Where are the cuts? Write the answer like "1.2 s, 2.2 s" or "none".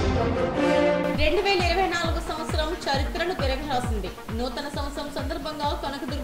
0.9 s

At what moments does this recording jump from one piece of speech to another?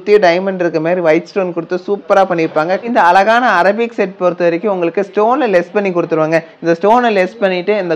2.9 s

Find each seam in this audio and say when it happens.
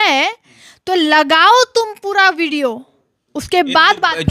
none

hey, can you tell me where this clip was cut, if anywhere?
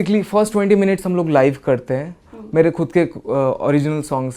none

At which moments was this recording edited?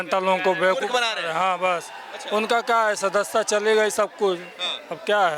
none

